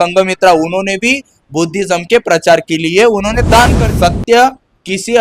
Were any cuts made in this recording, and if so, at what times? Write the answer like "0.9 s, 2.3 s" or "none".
3.9 s